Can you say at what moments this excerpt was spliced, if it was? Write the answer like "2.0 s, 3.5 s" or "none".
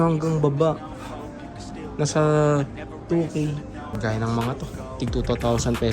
3.8 s